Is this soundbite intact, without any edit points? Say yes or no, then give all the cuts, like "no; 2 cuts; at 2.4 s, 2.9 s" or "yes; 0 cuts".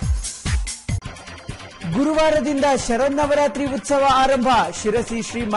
no; 2 cuts; at 0.9 s, 1.6 s